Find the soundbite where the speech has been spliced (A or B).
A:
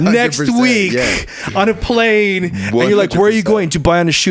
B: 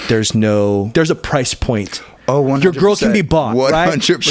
B